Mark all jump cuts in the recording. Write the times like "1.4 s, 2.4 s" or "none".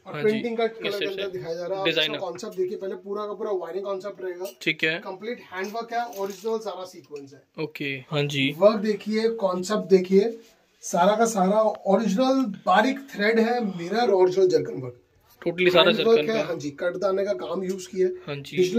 0.9 s, 8.0 s, 14.1 s